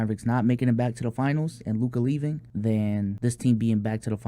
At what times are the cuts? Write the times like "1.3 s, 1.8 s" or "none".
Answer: 2.8 s

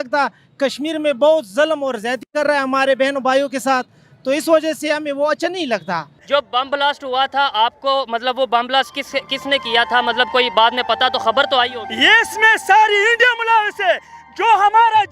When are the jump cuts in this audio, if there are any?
6.2 s

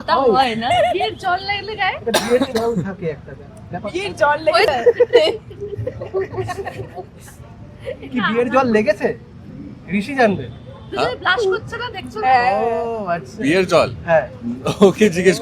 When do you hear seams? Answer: none

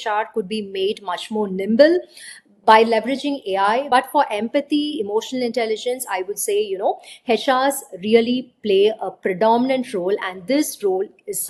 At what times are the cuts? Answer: none

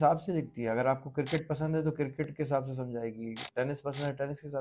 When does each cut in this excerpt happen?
none

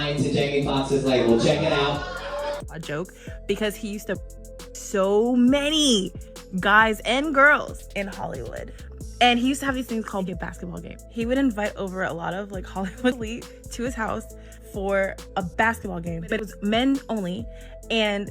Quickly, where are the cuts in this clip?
2.6 s

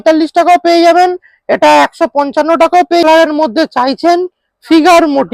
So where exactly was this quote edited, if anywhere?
3.0 s

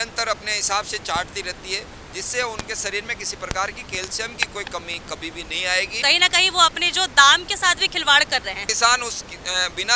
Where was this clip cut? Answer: 5.9 s, 8.7 s

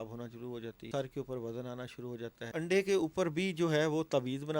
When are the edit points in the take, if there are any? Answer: 0.8 s, 2.5 s

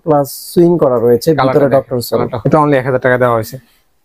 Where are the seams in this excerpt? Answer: 2.3 s

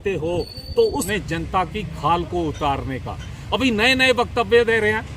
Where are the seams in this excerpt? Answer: 1.1 s

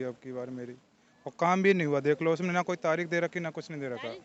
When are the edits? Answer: none

